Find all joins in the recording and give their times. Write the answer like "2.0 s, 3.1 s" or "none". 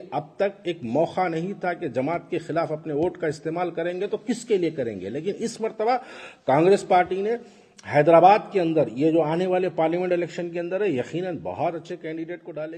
none